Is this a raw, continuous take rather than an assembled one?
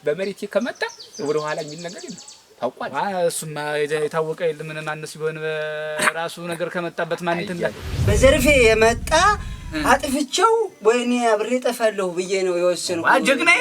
no; 1 cut; at 8.1 s

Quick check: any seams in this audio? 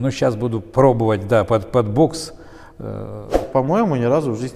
yes; 1 cut; at 3.4 s

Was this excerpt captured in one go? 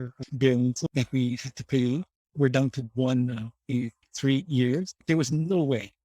no; 3 cuts; at 0.8 s, 4.0 s, 5.0 s

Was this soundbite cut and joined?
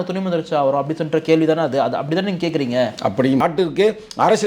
yes; 1 cut; at 3.4 s

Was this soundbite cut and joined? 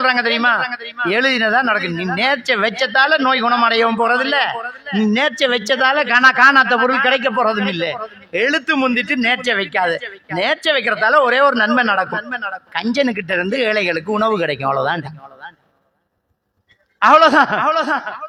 no; 0 cuts

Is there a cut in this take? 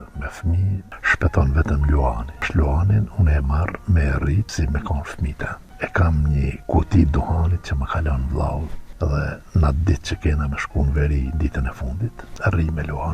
yes; 7 cuts; at 0.9 s, 2.5 s, 4.5 s, 5.7 s, 6.6 s, 9.3 s, 12.3 s

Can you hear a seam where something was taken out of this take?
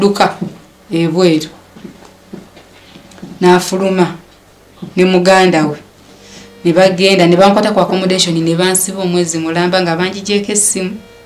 no; 0 cuts

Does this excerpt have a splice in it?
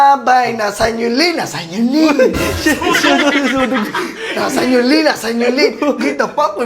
no; 0 cuts

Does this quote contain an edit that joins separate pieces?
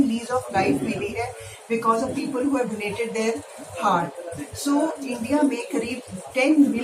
no; 0 cuts

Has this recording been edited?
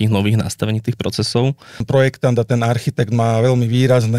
yes; 1 cut; at 1.8 s

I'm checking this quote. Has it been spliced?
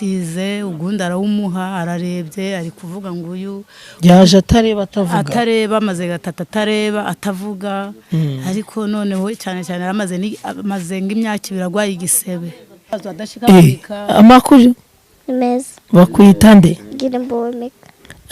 yes; 1 cut; at 12.9 s

